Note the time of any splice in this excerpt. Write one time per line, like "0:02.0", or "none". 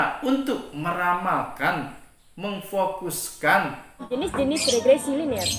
0:04.0

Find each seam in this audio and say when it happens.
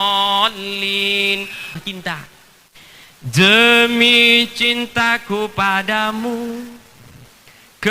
0:01.8

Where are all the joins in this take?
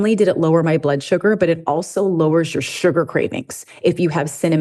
none

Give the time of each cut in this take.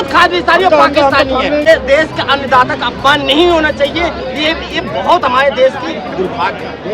0:01.6

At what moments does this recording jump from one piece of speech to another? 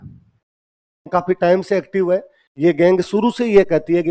0:01.1

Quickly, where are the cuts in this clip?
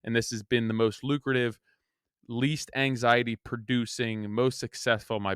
none

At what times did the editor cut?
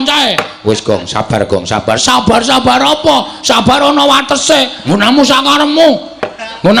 0:04.8

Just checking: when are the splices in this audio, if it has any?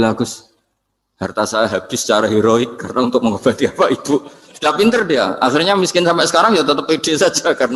none

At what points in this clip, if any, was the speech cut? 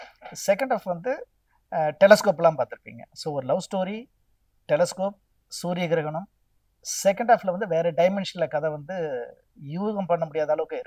none

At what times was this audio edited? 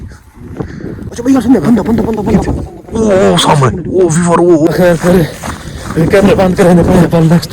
0:01.0
0:04.7

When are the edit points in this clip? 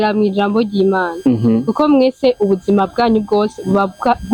none

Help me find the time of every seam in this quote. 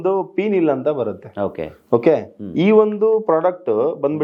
none

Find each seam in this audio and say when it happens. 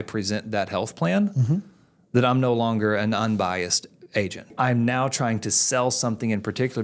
0:04.5

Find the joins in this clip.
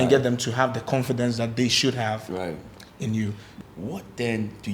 0:03.4

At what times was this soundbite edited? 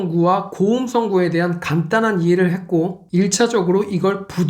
0:03.0

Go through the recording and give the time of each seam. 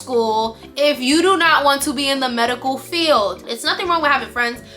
0:03.4

